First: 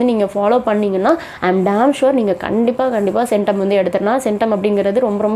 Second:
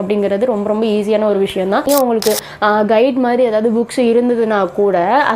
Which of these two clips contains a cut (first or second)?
second